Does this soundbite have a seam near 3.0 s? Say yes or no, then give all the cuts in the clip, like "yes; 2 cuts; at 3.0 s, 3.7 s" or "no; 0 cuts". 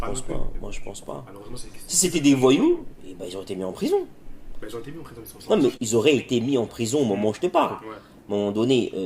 no; 1 cut; at 5.8 s